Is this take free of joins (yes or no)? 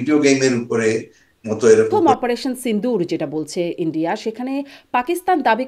no